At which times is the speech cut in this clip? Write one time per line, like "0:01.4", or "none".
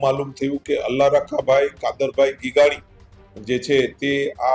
none